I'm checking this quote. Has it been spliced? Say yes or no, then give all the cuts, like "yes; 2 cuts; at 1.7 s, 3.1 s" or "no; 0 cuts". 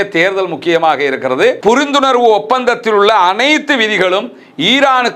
yes; 1 cut; at 1.6 s